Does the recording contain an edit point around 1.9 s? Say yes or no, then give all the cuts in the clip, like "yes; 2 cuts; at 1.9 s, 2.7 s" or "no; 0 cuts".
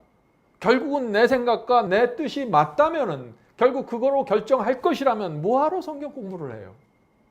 yes; 1 cut; at 1.9 s